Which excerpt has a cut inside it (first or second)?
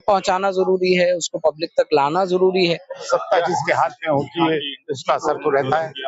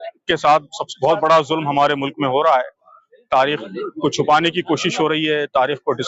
first